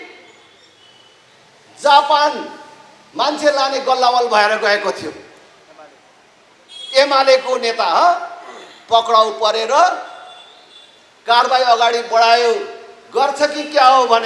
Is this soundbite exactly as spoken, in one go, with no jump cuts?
yes; 0 cuts

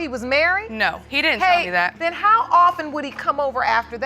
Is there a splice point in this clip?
yes; 2 cuts; at 1.1 s, 1.9 s

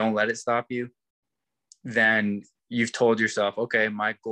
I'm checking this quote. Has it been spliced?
no; 0 cuts

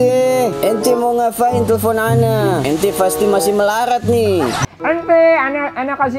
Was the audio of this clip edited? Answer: yes; 1 cut; at 4.7 s

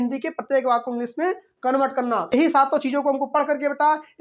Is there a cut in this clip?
yes; 1 cut; at 2.3 s

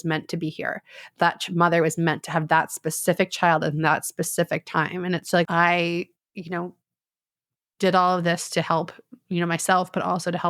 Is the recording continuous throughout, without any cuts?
no; 1 cut; at 5.5 s

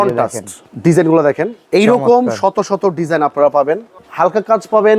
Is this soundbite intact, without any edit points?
no; 2 cuts; at 1.6 s, 4.0 s

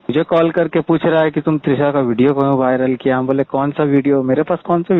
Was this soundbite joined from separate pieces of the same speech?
no; 0 cuts

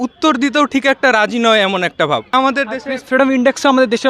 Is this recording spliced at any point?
no; 0 cuts

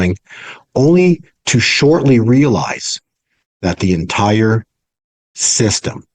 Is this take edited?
no; 0 cuts

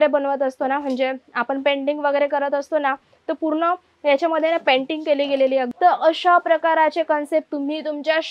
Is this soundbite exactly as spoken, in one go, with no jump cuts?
no; 1 cut; at 5.7 s

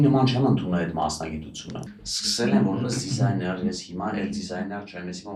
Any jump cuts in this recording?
no; 0 cuts

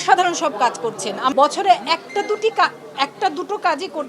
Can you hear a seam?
yes; 1 cut; at 1.3 s

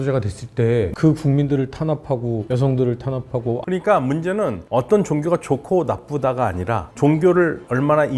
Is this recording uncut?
no; 2 cuts; at 0.9 s, 3.6 s

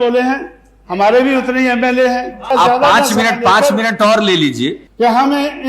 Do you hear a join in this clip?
yes; 2 cuts; at 2.4 s, 4.8 s

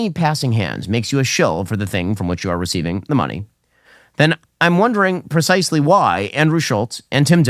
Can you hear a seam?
no; 0 cuts

